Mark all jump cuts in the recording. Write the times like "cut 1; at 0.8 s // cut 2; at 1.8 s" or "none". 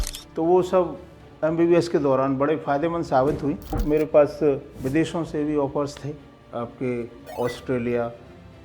cut 1; at 3.8 s // cut 2; at 4.7 s // cut 3; at 7.2 s